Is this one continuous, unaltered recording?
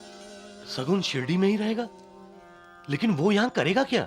yes; 0 cuts

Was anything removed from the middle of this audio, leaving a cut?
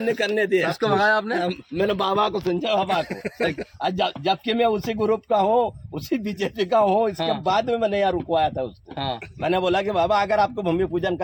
no; 0 cuts

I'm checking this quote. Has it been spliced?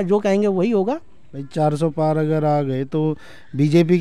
no; 0 cuts

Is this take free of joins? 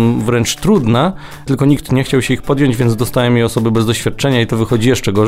yes; 0 cuts

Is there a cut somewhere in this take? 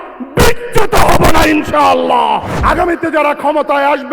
yes; 1 cut; at 2.5 s

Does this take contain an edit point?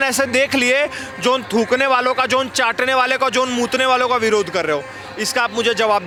no; 0 cuts

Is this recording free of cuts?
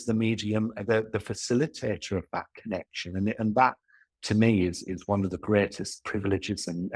yes; 0 cuts

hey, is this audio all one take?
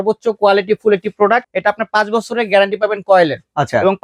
no; 1 cut; at 1.5 s

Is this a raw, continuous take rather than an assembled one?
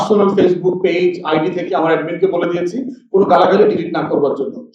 yes; 0 cuts

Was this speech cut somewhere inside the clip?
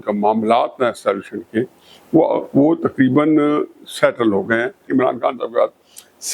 yes; 1 cut; at 4.9 s

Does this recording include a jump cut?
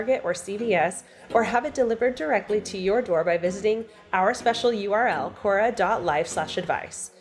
no; 0 cuts

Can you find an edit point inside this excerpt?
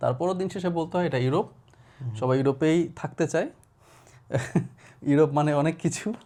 no; 0 cuts

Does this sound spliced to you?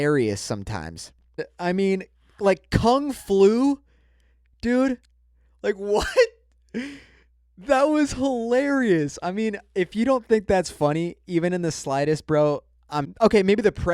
yes; 2 cuts; at 1.4 s, 13.1 s

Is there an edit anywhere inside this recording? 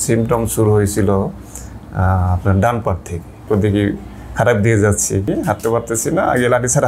yes; 2 cuts; at 3.4 s, 5.3 s

